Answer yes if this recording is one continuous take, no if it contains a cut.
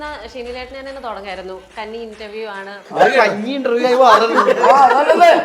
no